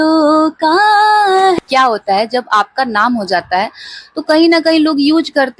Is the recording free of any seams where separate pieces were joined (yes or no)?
no